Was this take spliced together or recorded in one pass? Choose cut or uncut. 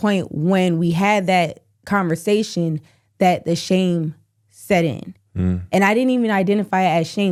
uncut